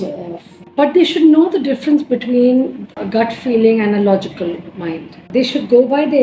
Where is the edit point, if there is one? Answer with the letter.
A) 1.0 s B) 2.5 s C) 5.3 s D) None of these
C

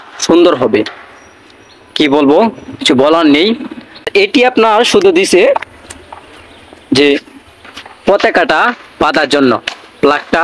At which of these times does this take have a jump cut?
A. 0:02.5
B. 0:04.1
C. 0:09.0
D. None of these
B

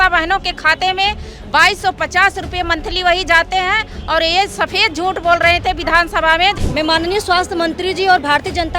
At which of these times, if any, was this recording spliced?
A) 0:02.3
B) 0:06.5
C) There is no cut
B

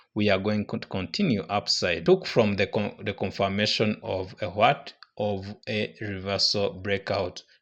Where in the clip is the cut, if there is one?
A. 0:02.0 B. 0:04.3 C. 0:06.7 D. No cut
A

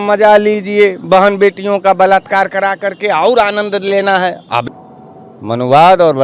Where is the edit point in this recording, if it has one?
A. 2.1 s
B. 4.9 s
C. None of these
B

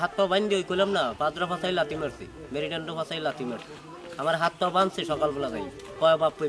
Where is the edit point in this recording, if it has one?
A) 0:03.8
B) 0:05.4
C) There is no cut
C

